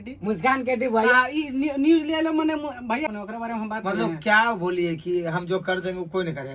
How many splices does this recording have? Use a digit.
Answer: 1